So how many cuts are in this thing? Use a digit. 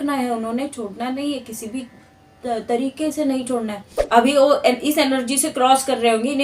1